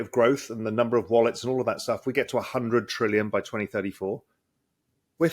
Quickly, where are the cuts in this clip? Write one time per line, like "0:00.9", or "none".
none